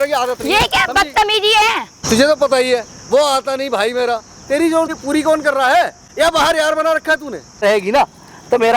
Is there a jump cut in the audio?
yes; 3 cuts; at 1.9 s, 4.9 s, 7.6 s

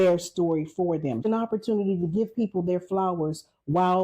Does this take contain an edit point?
yes; 1 cut; at 1.3 s

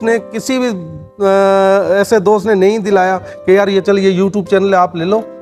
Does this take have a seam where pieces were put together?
no; 0 cuts

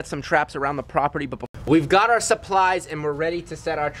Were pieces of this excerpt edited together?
yes; 1 cut; at 1.4 s

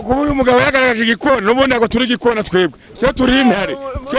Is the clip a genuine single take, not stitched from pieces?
yes; 0 cuts

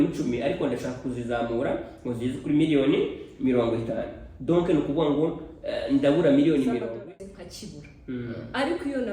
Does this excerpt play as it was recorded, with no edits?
no; 1 cut; at 6.9 s

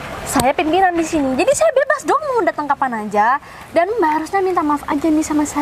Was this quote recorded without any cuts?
yes; 0 cuts

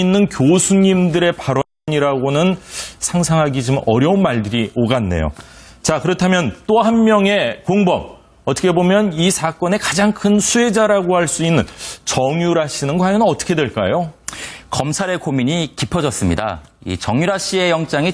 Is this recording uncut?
no; 1 cut; at 1.8 s

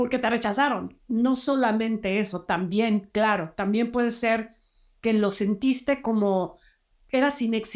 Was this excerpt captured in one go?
yes; 0 cuts

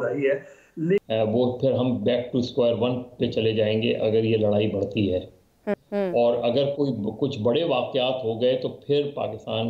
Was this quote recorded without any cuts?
no; 2 cuts; at 1.1 s, 5.7 s

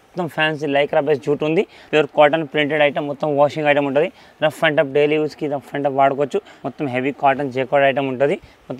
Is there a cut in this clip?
yes; 2 cuts; at 1.8 s, 6.6 s

